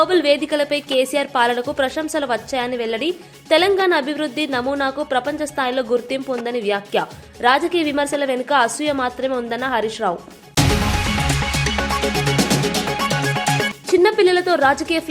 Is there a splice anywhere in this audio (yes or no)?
no